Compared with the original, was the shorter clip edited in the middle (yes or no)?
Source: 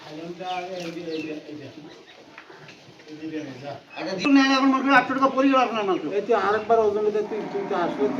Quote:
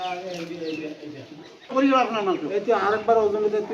yes